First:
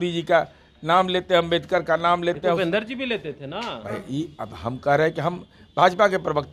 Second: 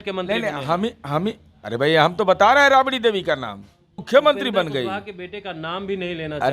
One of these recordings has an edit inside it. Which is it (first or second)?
second